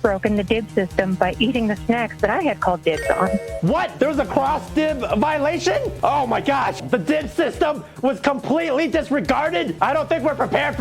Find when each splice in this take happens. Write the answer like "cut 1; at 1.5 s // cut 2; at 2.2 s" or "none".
cut 1; at 3.7 s // cut 2; at 5.9 s // cut 3; at 6.8 s // cut 4; at 9.7 s